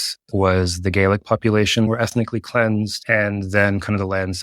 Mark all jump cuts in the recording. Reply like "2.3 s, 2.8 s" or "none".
1.9 s